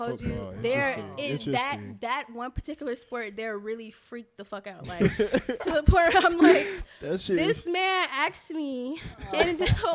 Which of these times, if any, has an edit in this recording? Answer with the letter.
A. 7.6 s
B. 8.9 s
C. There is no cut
C